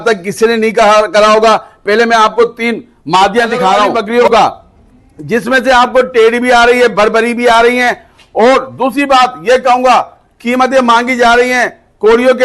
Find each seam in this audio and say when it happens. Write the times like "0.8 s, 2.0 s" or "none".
3.9 s